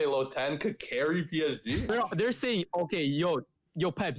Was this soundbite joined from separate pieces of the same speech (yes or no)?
yes